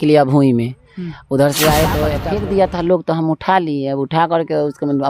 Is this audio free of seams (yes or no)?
no